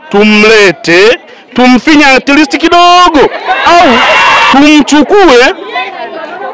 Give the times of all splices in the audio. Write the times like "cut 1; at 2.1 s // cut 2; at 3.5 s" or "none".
cut 1; at 4.5 s